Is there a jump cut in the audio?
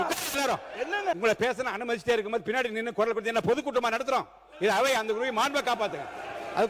yes; 1 cut; at 1.2 s

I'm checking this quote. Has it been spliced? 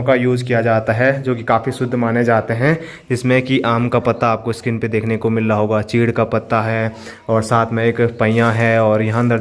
no; 0 cuts

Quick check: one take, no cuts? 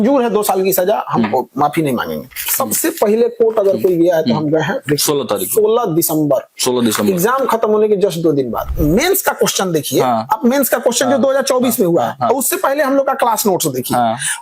no; 2 cuts; at 2.4 s, 8.7 s

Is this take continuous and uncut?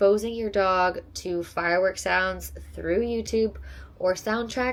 yes; 0 cuts

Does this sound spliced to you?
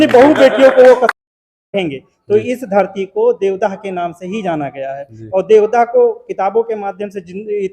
yes; 1 cut; at 1.1 s

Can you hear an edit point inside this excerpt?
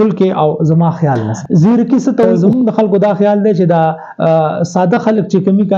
yes; 2 cuts; at 1.3 s, 2.4 s

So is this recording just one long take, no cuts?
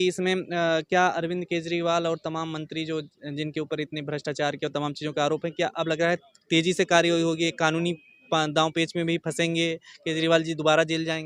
yes; 0 cuts

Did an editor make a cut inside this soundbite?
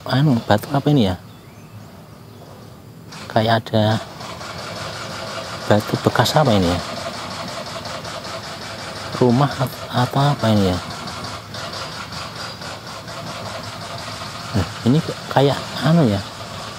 no; 0 cuts

